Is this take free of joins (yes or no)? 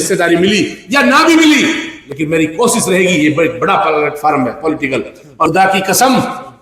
no